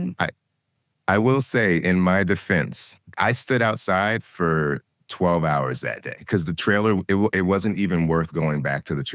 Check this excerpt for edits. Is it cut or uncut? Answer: cut